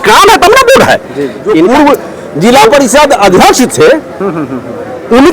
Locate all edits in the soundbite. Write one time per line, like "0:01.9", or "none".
0:01.5